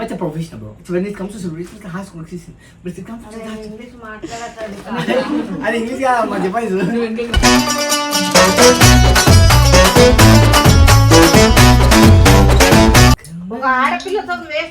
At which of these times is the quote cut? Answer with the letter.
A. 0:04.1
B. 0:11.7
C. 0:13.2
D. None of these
C